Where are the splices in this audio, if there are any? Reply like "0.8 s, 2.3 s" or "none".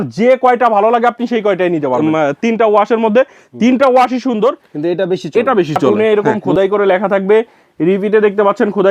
2.0 s, 5.9 s